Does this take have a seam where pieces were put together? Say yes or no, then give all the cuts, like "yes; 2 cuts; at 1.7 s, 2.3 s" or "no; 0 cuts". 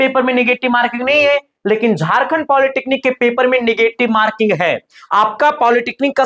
yes; 1 cut; at 4.9 s